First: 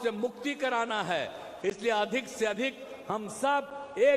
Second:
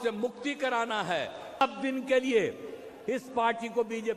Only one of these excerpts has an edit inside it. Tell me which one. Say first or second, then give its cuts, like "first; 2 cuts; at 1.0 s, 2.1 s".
second; 1 cut; at 1.6 s